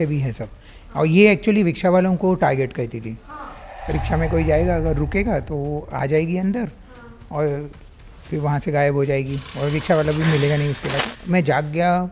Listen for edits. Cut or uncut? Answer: cut